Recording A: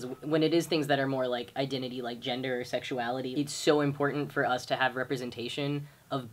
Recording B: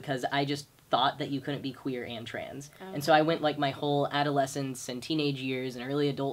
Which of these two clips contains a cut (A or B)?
A